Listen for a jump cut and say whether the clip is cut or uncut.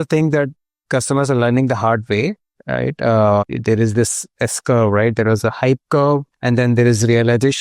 cut